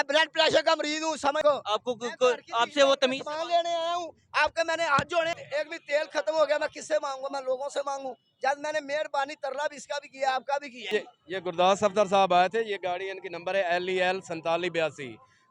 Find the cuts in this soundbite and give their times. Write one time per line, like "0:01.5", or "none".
0:01.4
0:05.4
0:10.7